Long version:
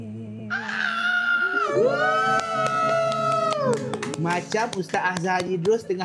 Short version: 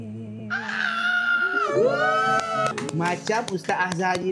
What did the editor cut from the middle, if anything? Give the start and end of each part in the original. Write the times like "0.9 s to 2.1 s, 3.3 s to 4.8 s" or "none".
2.7 s to 4.0 s